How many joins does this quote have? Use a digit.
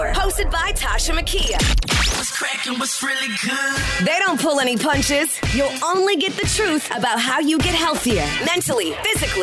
0